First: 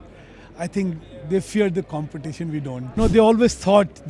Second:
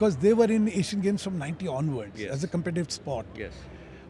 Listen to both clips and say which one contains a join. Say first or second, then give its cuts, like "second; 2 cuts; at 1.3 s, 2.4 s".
first; 1 cut; at 3.0 s